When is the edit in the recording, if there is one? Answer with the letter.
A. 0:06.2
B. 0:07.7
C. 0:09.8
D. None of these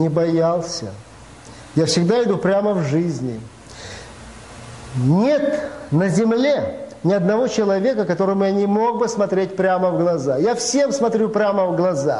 D